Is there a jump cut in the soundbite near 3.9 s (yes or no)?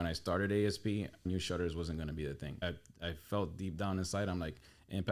no